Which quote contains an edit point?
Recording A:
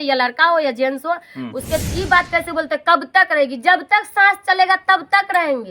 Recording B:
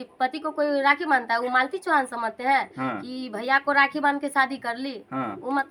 A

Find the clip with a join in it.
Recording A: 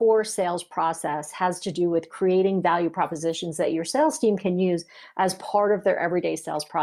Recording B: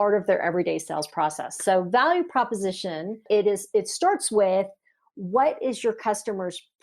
B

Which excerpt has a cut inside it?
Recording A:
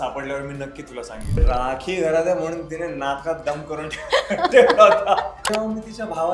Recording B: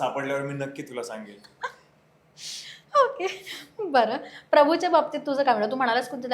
A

